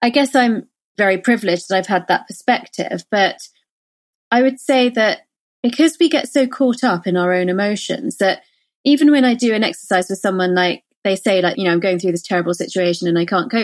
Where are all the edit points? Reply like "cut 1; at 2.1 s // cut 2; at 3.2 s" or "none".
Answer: cut 1; at 1.0 s // cut 2; at 11.5 s